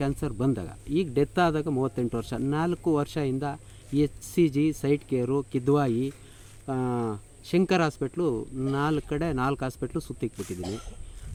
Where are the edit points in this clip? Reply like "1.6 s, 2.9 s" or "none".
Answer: none